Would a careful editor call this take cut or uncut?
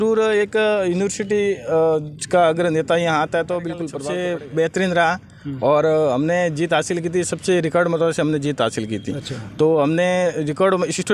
cut